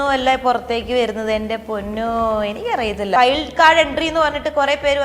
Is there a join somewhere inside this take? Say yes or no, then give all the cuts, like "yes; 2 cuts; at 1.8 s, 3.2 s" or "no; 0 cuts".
yes; 1 cut; at 3.2 s